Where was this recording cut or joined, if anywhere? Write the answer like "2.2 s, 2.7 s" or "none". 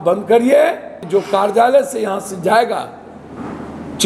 1.0 s